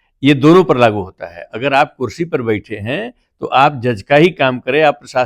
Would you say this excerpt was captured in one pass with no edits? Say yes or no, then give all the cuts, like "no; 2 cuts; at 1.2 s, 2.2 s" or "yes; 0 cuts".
yes; 0 cuts